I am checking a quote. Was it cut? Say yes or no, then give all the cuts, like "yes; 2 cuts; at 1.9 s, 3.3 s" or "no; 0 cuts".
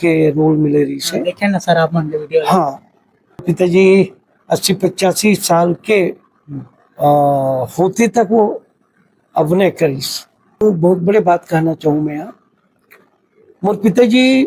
yes; 2 cuts; at 3.4 s, 10.6 s